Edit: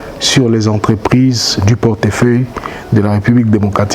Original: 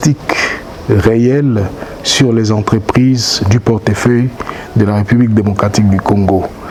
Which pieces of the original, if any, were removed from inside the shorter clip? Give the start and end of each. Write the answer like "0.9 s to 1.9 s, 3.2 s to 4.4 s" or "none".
none

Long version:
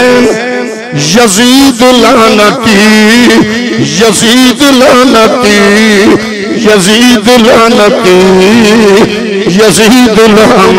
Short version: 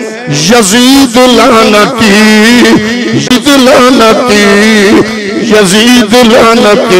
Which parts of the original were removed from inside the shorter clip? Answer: 4.0 s to 4.4 s

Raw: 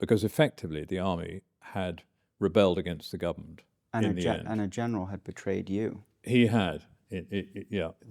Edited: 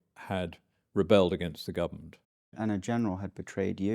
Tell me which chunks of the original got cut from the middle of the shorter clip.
3.9 s to 4.4 s

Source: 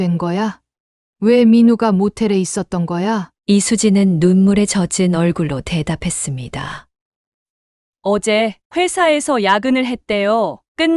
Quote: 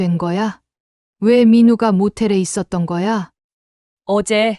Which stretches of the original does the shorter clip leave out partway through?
3.3 s to 7.3 s

